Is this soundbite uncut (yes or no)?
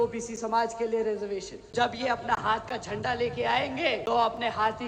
no